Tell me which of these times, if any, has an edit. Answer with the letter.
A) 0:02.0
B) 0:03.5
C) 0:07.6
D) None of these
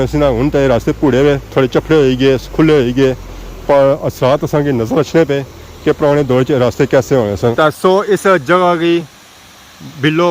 C